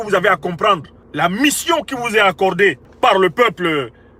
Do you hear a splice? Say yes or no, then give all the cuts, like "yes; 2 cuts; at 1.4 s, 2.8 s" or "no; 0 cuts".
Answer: yes; 2 cuts; at 1.0 s, 2.9 s